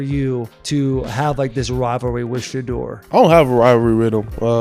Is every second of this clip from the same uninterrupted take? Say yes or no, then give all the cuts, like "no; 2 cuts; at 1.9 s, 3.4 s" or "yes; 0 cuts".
yes; 0 cuts